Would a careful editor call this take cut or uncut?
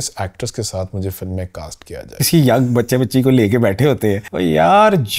cut